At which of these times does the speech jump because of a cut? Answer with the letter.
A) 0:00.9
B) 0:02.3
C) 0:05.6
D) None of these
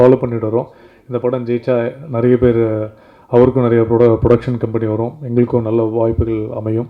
D